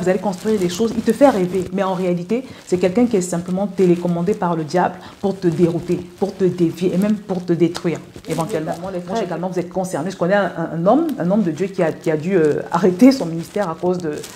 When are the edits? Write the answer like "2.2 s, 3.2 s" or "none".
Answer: 8.7 s